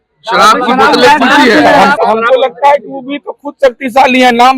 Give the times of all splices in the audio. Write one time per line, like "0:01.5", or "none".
0:01.9